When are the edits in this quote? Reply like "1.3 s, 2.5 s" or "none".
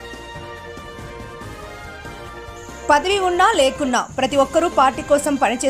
1.8 s, 2.5 s

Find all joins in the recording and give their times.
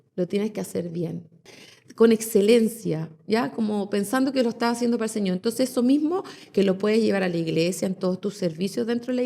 1.4 s

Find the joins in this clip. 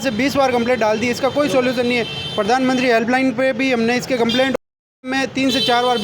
5.0 s

